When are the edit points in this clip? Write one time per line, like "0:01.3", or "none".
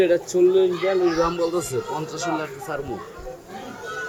none